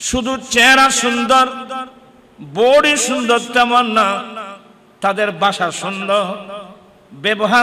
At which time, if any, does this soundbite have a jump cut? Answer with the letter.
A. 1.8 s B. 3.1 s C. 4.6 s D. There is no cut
D